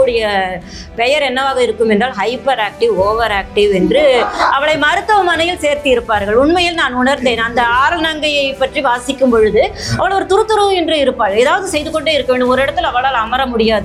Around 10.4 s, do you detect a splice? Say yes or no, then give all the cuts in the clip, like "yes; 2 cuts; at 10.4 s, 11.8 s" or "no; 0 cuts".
no; 0 cuts